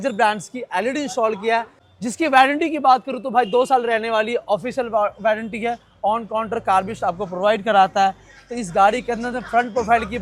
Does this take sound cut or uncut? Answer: uncut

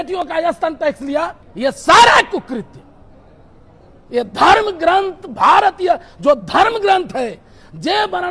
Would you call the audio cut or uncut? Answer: uncut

